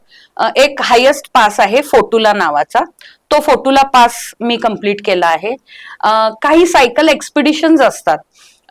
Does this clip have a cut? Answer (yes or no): no